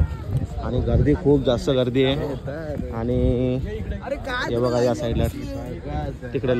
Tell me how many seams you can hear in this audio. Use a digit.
0